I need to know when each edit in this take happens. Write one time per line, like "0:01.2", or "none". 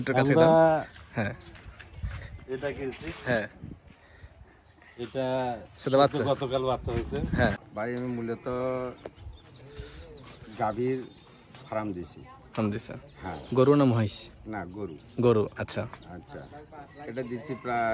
0:07.6